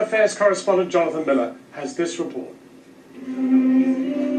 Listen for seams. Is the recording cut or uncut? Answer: cut